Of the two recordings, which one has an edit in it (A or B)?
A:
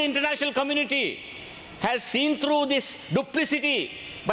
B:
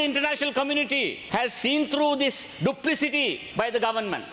B